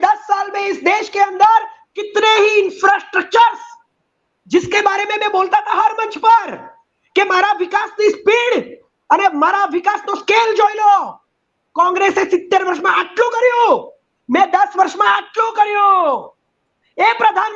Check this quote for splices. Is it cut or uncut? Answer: uncut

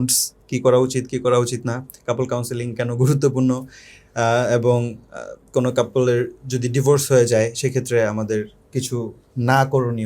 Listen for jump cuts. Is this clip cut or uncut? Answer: uncut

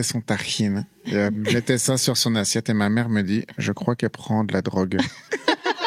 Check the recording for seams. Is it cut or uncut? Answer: uncut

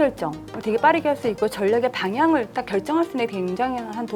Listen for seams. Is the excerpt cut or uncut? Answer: uncut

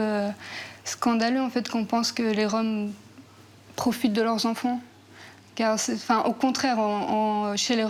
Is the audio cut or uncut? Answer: uncut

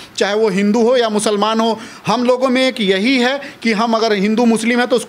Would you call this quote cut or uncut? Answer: uncut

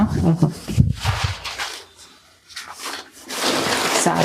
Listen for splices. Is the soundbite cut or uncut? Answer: cut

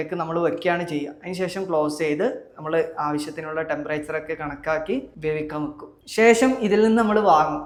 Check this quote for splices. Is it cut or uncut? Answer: uncut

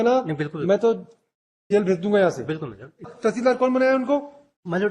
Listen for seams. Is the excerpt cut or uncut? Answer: cut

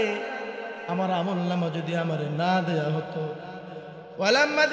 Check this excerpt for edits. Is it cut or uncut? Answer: uncut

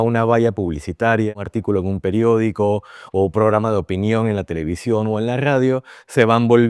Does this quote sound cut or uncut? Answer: cut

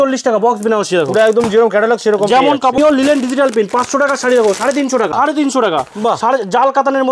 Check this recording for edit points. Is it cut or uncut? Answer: cut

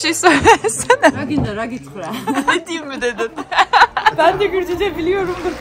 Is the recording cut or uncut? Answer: cut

